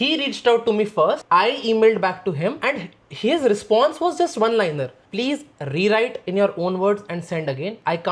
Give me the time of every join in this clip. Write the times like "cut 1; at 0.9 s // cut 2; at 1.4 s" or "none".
none